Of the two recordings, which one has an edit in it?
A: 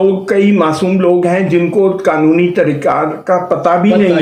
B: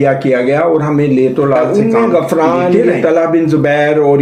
B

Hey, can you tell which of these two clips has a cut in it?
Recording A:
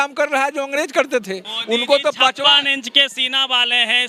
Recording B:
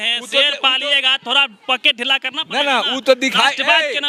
A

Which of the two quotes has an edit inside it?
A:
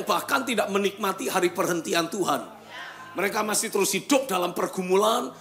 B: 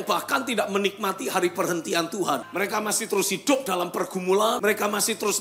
B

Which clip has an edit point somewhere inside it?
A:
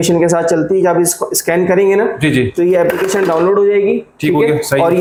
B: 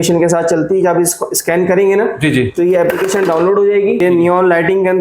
B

